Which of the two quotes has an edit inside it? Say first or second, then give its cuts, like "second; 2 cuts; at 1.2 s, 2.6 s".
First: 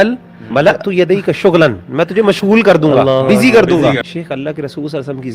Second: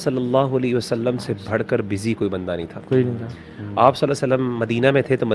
first; 1 cut; at 4.0 s